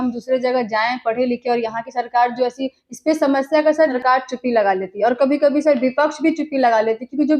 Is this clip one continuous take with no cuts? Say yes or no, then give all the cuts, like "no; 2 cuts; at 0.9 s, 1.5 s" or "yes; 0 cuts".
no; 1 cut; at 4.0 s